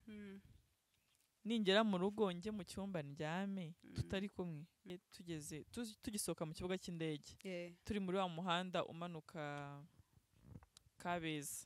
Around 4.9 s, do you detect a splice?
yes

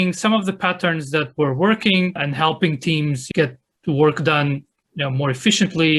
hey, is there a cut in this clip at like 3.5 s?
no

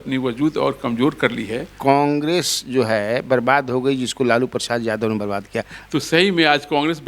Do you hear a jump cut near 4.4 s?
no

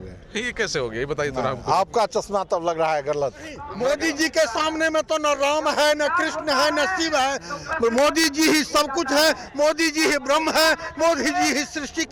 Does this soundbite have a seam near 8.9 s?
no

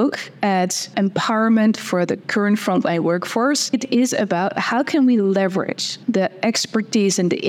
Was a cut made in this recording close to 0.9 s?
yes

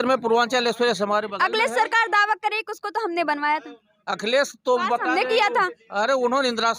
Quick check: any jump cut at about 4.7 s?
no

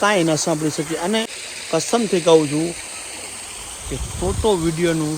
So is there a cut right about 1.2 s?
yes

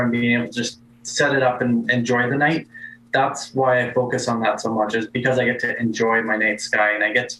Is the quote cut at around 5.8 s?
no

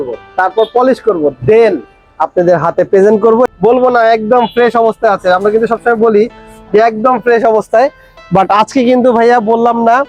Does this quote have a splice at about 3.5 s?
yes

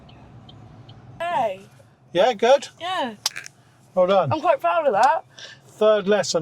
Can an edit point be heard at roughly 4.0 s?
no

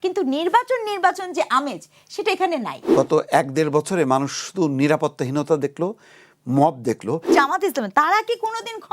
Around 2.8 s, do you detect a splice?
yes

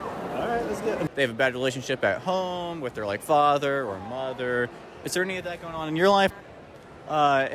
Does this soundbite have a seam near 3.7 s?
no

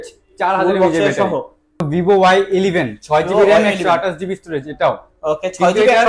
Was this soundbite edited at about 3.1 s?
no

